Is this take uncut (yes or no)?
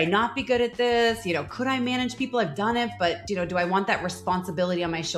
yes